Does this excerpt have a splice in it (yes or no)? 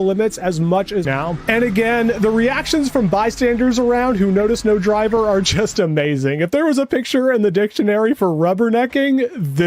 yes